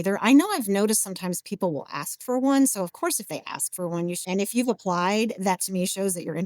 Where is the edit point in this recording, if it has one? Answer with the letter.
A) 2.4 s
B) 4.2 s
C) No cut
B